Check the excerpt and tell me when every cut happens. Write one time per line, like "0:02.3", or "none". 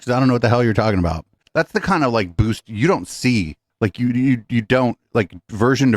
0:01.3